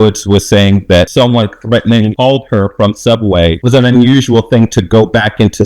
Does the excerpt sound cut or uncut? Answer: cut